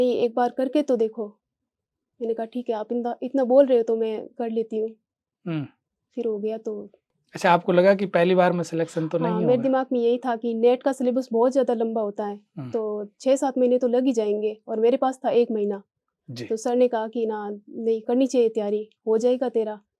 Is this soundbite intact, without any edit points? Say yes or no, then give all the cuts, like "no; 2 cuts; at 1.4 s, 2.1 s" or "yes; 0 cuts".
yes; 0 cuts